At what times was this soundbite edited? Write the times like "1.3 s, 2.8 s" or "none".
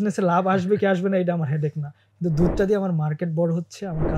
none